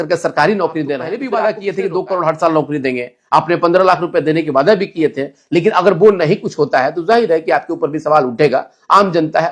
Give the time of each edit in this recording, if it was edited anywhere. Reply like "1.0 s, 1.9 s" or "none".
1.1 s